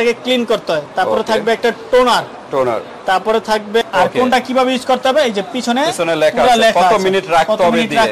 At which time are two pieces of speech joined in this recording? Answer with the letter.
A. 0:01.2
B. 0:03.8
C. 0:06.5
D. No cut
B